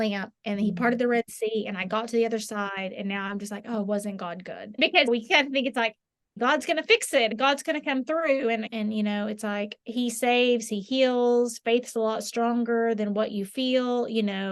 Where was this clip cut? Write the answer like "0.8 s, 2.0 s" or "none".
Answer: 4.8 s, 6.3 s, 7.4 s, 8.7 s